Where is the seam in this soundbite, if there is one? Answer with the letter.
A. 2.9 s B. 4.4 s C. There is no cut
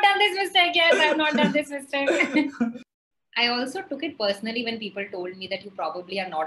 A